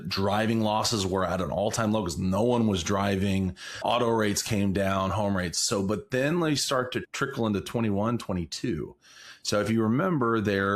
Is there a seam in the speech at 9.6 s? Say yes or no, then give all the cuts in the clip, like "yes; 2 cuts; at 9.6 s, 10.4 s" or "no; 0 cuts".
no; 1 cut; at 7.0 s